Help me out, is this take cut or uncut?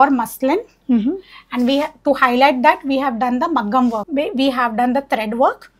cut